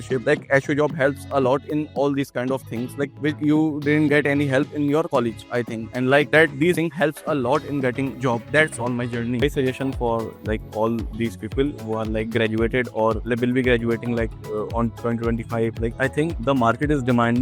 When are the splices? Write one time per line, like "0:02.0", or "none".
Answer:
0:09.4